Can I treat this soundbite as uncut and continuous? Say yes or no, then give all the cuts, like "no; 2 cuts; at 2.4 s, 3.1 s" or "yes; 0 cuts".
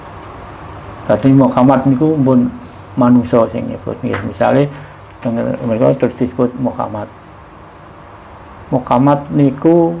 yes; 0 cuts